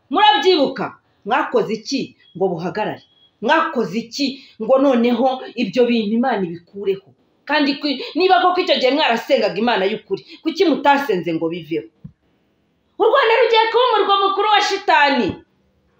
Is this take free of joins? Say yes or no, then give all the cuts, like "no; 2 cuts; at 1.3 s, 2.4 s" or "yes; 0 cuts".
yes; 0 cuts